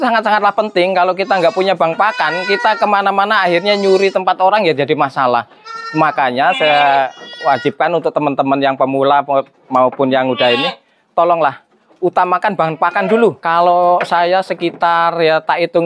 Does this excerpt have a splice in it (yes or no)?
yes